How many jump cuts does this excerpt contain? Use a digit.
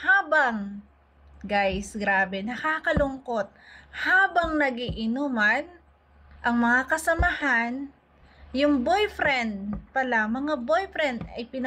0